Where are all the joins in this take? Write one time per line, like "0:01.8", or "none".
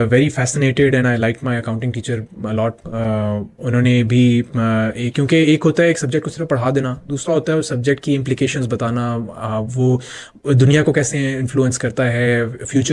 none